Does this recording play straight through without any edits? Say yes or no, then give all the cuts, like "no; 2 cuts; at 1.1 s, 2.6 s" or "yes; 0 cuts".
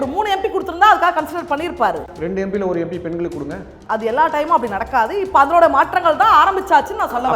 no; 2 cuts; at 2.1 s, 3.8 s